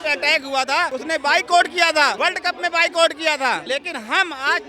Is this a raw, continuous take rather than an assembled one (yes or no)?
no